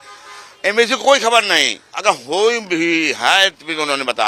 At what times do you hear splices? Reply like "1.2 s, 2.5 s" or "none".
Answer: none